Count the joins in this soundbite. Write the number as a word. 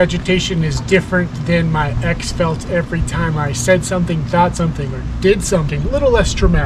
one